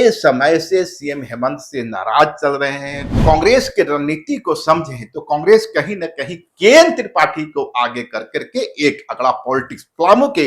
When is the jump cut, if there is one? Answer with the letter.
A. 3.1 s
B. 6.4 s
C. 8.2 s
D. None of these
A